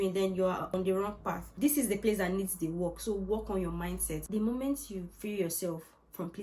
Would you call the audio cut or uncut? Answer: cut